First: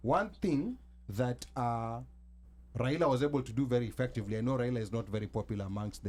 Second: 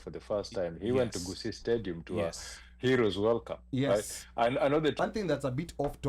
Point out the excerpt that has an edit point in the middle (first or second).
second